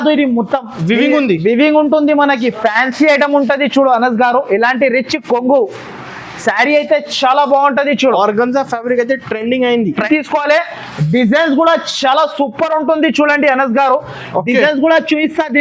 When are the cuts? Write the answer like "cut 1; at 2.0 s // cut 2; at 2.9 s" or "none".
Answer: cut 1; at 10.1 s